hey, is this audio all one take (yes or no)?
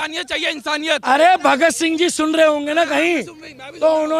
no